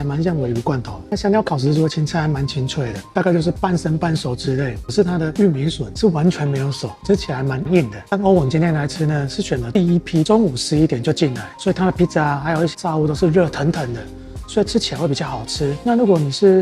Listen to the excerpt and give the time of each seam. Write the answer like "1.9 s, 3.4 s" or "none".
1.0 s, 3.1 s, 4.8 s, 8.0 s, 10.3 s, 12.7 s